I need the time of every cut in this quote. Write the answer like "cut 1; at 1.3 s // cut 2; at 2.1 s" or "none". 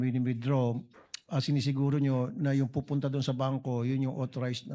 none